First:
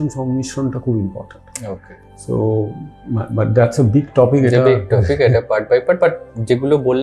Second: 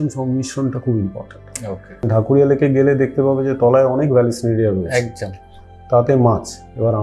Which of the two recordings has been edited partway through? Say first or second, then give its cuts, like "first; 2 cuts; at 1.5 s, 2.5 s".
second; 1 cut; at 2.1 s